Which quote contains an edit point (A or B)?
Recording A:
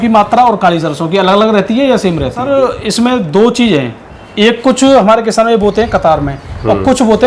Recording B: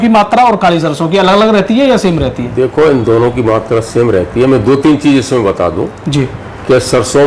A